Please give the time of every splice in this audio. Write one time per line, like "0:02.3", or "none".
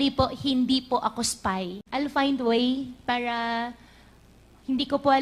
0:01.8